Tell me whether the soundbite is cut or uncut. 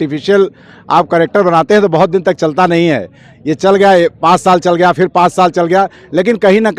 uncut